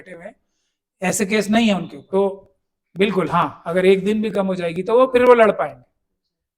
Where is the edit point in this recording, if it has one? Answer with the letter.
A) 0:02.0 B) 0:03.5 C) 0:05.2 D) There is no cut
A